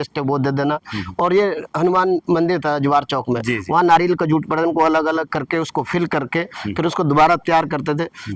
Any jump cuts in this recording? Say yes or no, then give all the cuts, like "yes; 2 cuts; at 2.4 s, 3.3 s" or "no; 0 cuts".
no; 0 cuts